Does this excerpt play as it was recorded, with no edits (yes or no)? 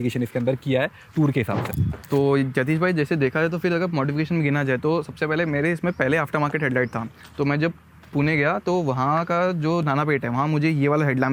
yes